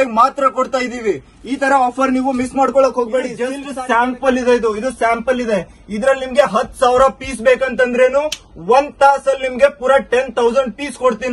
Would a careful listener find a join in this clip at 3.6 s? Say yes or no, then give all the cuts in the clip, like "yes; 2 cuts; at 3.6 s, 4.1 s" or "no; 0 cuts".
yes; 1 cut; at 3.6 s